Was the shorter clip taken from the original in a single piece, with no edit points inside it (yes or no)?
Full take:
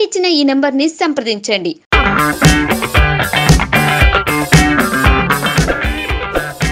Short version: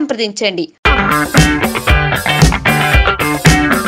yes